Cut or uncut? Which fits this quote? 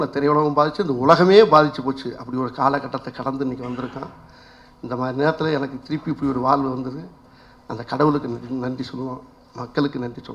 uncut